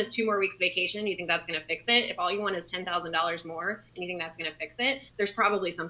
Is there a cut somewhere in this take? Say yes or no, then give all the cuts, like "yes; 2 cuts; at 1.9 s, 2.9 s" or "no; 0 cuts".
yes; 2 cuts; at 3.9 s, 5.1 s